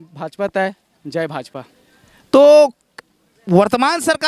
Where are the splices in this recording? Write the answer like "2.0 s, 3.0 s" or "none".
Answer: none

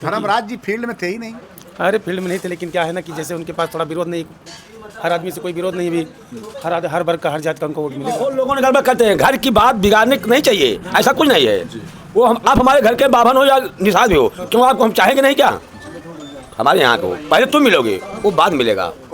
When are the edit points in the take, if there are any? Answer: 8.2 s

